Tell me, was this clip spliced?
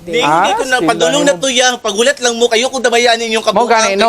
no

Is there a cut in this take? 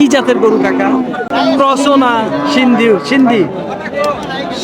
yes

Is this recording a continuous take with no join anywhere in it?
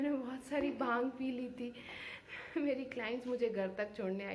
yes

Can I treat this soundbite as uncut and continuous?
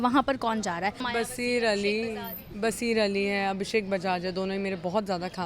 no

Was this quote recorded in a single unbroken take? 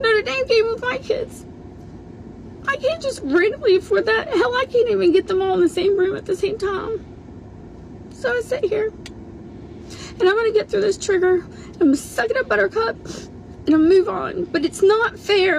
yes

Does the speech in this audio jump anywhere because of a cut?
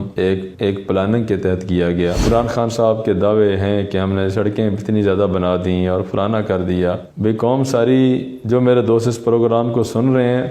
yes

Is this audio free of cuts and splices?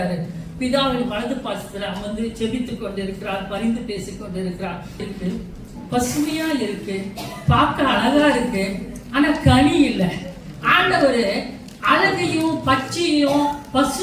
no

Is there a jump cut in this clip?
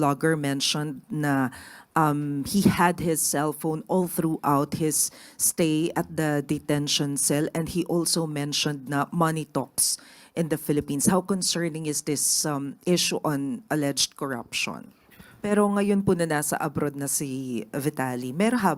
yes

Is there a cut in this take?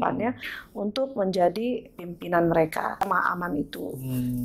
yes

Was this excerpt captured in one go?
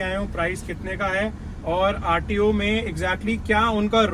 yes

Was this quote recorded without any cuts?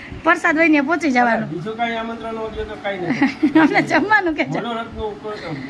yes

